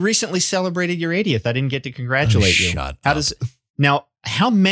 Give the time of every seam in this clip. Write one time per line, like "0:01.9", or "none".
none